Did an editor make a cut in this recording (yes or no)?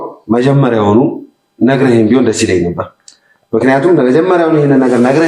no